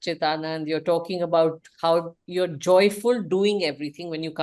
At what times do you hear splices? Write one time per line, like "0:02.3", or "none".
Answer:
none